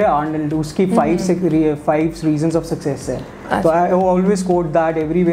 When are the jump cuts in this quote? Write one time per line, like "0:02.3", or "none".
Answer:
none